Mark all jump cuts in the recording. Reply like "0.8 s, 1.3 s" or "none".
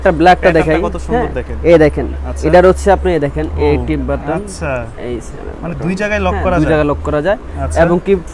none